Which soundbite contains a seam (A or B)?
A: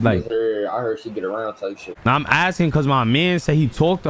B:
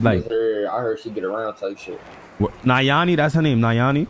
A